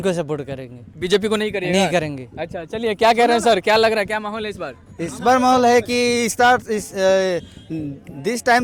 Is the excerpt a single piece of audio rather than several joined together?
yes; 0 cuts

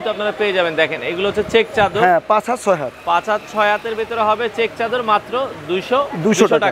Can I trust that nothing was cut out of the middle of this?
yes; 0 cuts

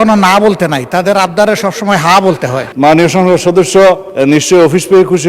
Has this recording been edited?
yes; 2 cuts; at 2.6 s, 4.1 s

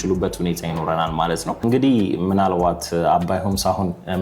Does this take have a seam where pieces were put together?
yes; 1 cut; at 1.6 s

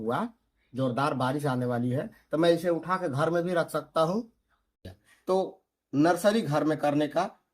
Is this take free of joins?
no; 1 cut; at 4.7 s

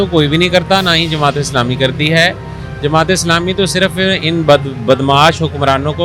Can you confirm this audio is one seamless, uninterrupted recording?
yes; 0 cuts

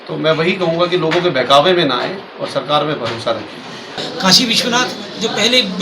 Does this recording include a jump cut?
yes; 1 cut; at 4.0 s

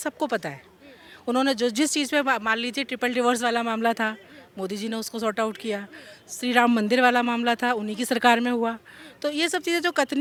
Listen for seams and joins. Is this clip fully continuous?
yes; 0 cuts

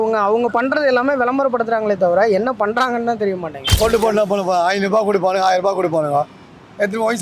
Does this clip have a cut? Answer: yes; 1 cut; at 3.6 s

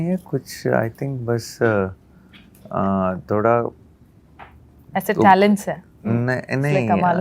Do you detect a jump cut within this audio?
no; 0 cuts

